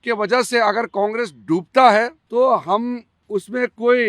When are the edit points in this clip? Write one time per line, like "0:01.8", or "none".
0:02.2
0:03.1

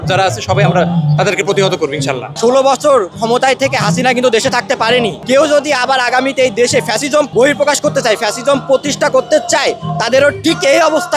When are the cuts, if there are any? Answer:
0:02.3
0:05.2
0:07.3

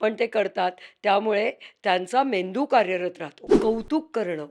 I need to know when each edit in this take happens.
0:03.5

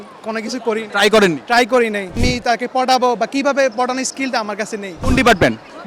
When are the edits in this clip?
0:02.1
0:05.0

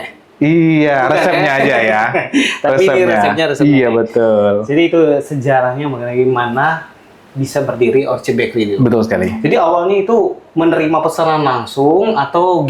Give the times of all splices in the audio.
none

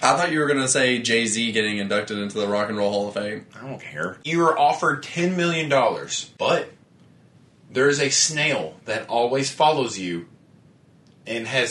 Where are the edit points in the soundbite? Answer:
0:04.2
0:06.2

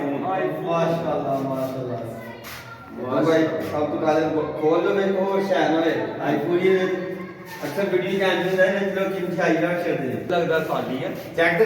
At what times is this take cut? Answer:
0:10.3

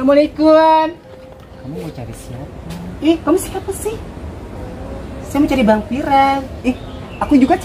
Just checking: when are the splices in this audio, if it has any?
0:01.1

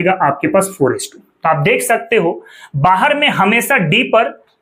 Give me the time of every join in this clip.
none

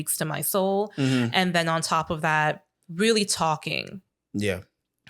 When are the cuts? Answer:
none

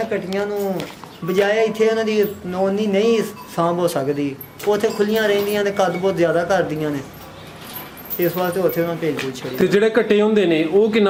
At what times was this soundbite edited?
none

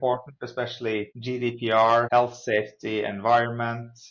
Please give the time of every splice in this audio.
0:01.1
0:02.1

